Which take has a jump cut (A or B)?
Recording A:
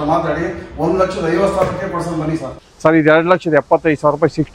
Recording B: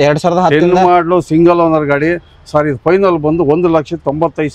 A